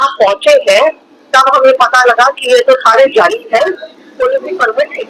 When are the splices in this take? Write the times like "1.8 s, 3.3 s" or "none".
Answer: none